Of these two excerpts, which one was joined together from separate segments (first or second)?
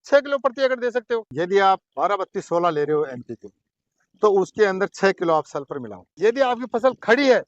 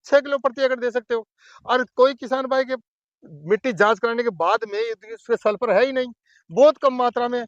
first